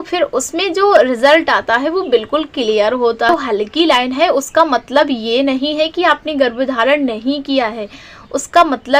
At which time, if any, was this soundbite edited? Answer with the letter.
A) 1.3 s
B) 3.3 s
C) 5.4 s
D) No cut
B